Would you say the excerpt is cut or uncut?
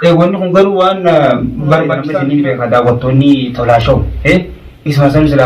cut